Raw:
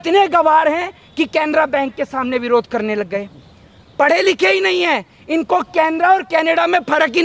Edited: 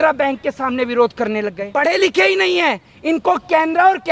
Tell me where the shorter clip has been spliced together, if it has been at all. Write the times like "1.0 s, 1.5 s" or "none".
1.6 s